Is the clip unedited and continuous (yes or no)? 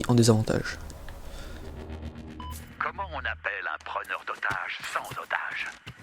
yes